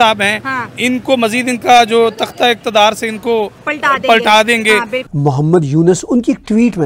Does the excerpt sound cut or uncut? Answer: cut